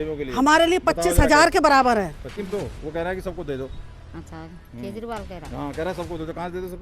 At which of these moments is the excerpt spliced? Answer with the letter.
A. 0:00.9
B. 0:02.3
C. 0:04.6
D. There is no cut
B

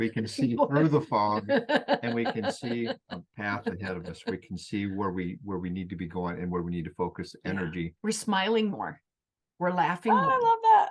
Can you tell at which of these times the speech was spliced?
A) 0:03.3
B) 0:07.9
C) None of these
B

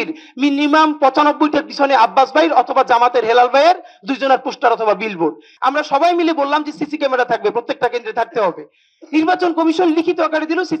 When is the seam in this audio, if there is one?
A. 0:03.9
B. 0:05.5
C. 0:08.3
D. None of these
B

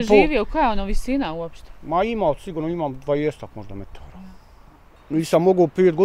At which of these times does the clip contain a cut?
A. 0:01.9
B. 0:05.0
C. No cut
B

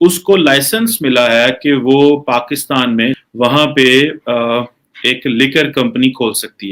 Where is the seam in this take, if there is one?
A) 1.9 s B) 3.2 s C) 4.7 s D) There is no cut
B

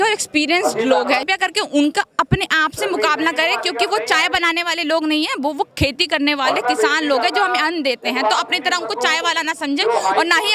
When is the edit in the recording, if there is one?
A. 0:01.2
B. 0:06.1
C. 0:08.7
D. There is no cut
A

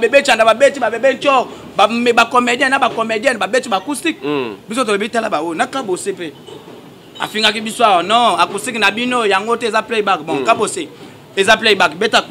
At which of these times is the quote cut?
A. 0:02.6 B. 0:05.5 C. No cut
C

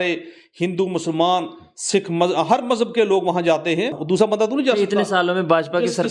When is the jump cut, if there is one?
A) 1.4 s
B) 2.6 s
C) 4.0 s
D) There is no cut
C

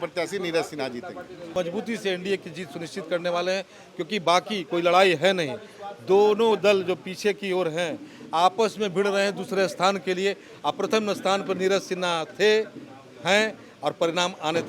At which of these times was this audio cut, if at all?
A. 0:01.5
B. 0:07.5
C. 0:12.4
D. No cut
A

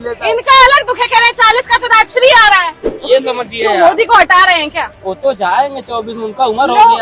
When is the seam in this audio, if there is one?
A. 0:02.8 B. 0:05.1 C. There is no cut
A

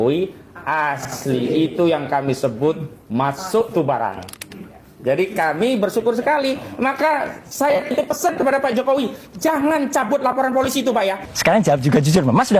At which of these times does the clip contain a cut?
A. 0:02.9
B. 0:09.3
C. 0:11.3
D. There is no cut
C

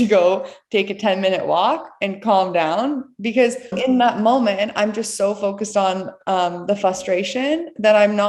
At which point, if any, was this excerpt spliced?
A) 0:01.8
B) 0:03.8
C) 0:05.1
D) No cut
B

